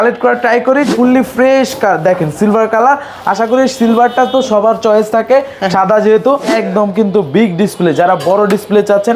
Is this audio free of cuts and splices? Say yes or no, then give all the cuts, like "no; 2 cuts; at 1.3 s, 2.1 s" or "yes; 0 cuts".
no; 2 cuts; at 0.9 s, 6.5 s